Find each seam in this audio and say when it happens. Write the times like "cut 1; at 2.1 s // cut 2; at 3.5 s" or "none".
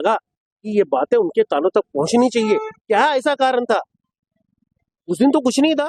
none

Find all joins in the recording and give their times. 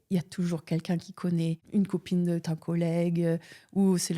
cut 1; at 1.6 s

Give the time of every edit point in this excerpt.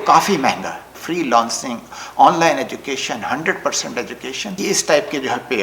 cut 1; at 0.9 s // cut 2; at 4.6 s

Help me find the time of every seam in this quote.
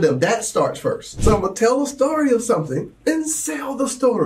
cut 1; at 1.1 s

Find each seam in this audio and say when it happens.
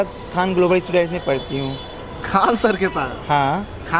none

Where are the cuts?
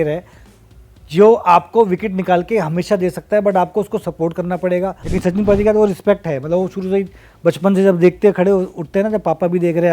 cut 1; at 5.0 s

